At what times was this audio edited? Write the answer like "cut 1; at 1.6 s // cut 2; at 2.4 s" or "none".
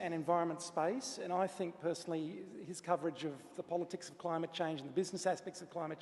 cut 1; at 2.8 s